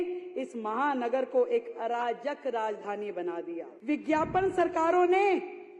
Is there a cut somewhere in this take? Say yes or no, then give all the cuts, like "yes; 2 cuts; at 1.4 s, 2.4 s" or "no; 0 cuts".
yes; 1 cut; at 3.7 s